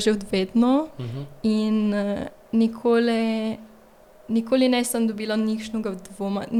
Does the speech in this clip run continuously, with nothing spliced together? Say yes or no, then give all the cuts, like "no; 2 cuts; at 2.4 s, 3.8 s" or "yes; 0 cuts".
yes; 0 cuts